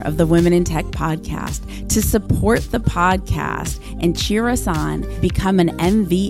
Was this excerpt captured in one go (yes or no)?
yes